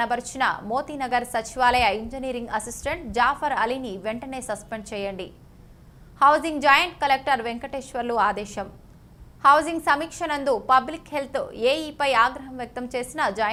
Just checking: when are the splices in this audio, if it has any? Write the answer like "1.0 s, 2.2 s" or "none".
none